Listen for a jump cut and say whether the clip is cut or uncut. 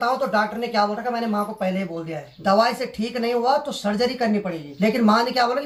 cut